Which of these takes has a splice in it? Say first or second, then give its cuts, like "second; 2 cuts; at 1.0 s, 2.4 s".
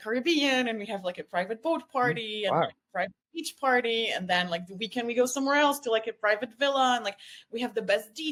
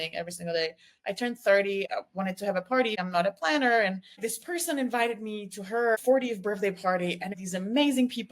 second; 5 cuts; at 1.9 s, 2.9 s, 4.2 s, 6.0 s, 7.4 s